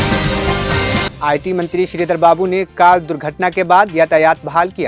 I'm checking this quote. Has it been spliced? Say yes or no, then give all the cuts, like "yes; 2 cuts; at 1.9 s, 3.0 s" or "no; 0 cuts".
yes; 1 cut; at 1.1 s